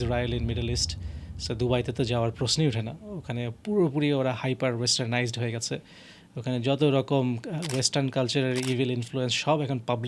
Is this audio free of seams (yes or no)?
yes